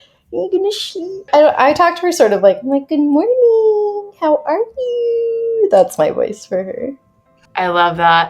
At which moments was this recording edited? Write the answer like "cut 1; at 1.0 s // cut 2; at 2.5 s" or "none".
cut 1; at 1.3 s // cut 2; at 7.4 s